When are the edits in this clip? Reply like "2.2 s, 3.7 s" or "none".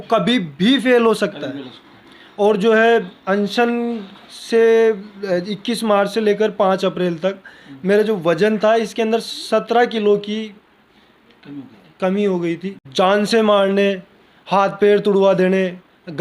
12.9 s